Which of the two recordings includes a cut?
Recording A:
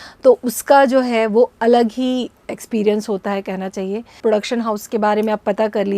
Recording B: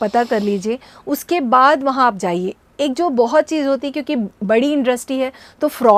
A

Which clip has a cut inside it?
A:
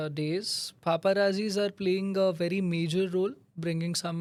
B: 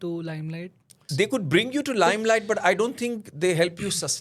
B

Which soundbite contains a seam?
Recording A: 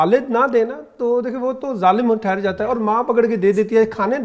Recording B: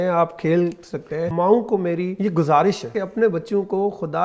B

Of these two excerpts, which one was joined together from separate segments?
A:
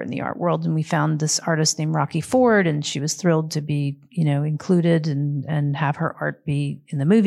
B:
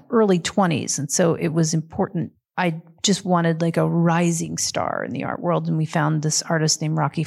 B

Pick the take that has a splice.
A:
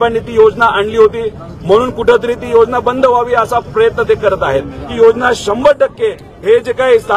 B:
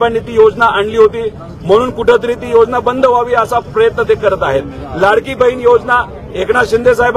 A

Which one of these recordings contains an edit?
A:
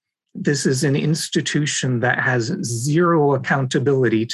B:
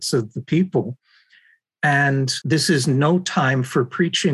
B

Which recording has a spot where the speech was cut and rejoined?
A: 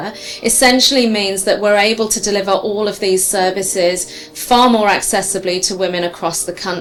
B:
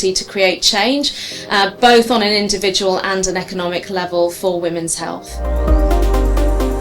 B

